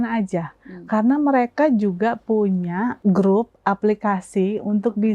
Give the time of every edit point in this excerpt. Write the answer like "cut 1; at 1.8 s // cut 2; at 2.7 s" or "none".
cut 1; at 3.0 s

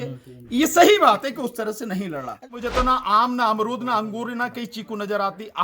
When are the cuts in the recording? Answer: cut 1; at 2.5 s

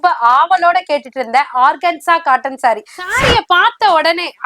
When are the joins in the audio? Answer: cut 1; at 3.0 s

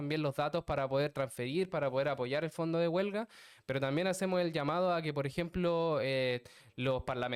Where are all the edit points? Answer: none

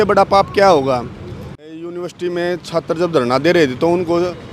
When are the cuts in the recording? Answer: cut 1; at 1.6 s

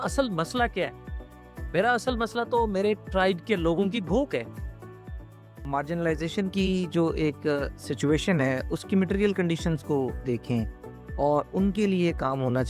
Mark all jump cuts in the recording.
cut 1; at 5.6 s

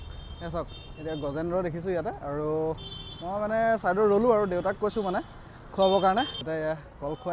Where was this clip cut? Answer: cut 1; at 6.4 s

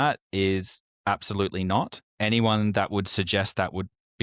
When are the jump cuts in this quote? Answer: cut 1; at 2.0 s

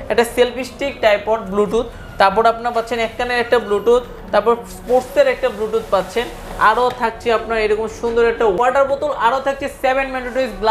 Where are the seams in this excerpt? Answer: cut 1; at 8.6 s

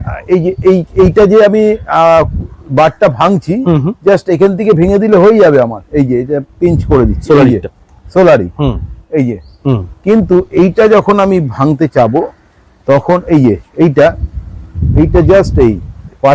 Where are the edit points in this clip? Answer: none

